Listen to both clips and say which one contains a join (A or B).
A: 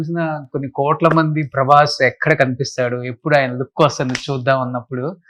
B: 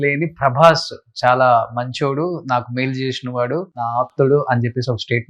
B